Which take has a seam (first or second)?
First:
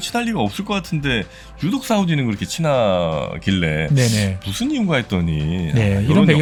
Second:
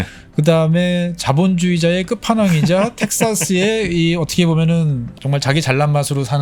second